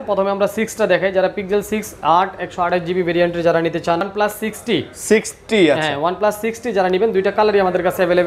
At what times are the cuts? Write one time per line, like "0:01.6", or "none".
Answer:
0:04.1

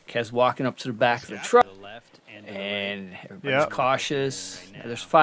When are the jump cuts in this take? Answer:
0:01.6

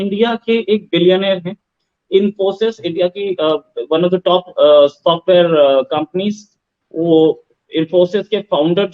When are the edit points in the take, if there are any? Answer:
none

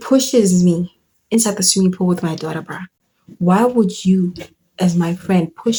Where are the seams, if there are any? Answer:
none

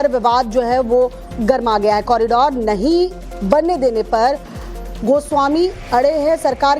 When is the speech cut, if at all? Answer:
0:03.3

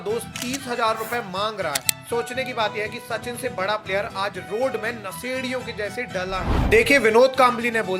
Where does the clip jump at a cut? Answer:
0:01.9
0:06.5

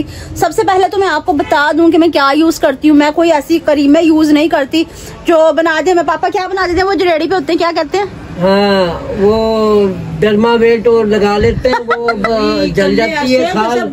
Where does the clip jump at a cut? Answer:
none

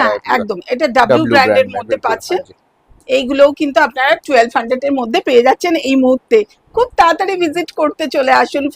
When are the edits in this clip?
none

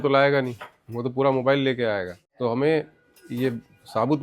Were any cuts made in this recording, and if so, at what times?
0:02.2

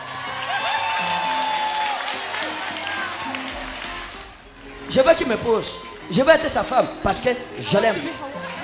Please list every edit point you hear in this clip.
0:04.4

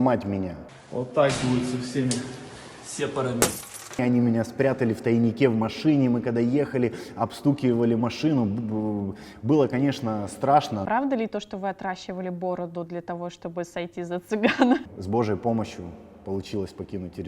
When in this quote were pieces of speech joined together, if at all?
0:04.0
0:10.8
0:14.8

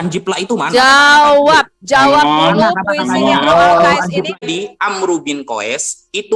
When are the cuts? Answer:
0:04.4

